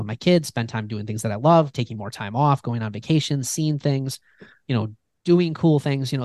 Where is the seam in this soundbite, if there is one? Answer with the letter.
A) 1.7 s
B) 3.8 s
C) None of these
A